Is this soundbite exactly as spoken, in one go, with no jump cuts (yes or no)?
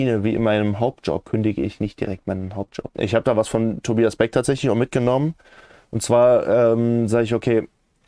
no